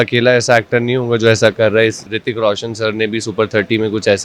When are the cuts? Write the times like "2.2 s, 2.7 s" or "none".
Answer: 2.0 s